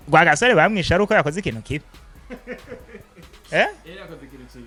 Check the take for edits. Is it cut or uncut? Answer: uncut